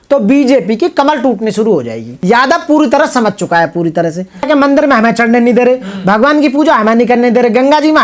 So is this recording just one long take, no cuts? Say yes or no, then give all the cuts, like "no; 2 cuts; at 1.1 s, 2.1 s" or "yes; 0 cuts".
no; 2 cuts; at 2.1 s, 4.5 s